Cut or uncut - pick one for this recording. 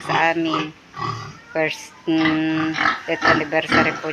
uncut